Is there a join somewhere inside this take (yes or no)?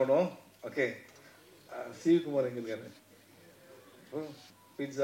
no